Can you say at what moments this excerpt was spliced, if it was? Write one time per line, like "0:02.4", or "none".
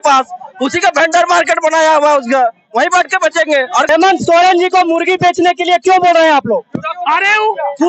0:03.9